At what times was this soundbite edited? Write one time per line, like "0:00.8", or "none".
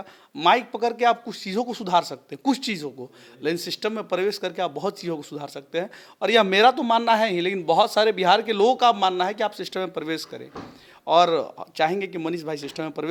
none